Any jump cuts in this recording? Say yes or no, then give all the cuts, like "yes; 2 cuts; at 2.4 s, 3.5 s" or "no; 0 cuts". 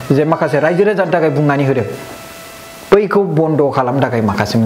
no; 0 cuts